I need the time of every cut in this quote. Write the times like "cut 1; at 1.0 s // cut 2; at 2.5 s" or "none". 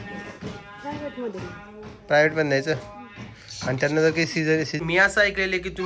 cut 1; at 4.7 s